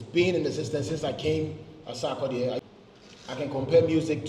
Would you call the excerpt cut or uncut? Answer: cut